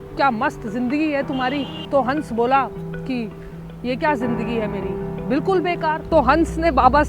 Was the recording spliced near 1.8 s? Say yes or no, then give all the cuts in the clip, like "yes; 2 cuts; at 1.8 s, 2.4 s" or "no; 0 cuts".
yes; 2 cuts; at 1.8 s, 6.0 s